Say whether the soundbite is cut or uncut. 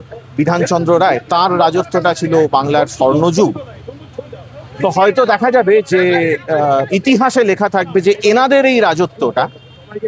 uncut